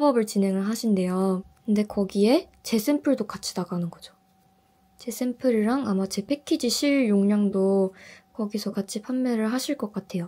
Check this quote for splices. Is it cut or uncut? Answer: uncut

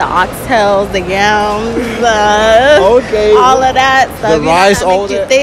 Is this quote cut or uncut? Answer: uncut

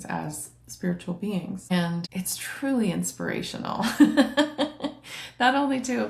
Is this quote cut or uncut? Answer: uncut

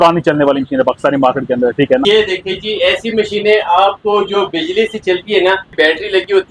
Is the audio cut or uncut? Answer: cut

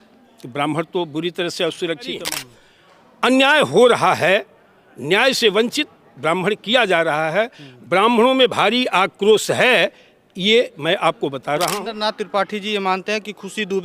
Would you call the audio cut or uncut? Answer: cut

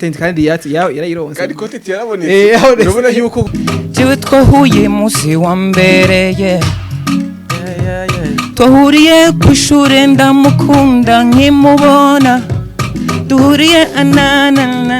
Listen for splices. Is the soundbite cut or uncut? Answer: cut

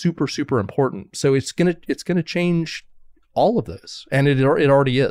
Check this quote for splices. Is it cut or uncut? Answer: uncut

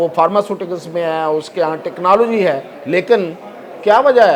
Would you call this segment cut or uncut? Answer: cut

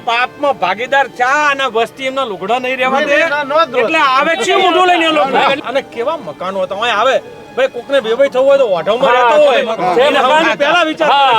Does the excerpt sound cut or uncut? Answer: cut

